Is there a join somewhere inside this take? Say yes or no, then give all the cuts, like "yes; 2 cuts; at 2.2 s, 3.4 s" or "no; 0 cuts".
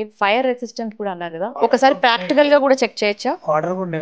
yes; 1 cut; at 1.5 s